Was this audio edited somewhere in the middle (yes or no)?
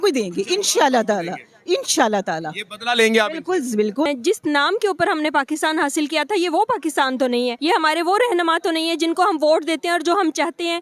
yes